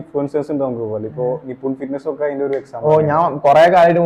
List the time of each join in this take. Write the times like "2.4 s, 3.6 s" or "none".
none